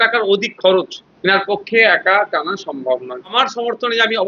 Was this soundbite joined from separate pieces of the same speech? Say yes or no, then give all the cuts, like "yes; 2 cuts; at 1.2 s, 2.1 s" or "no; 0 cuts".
yes; 2 cuts; at 1.0 s, 3.4 s